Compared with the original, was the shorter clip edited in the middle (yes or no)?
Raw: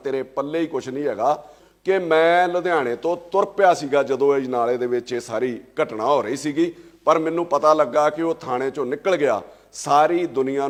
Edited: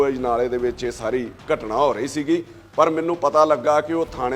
no